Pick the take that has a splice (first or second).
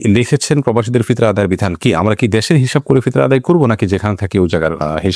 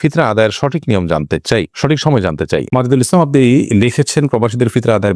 second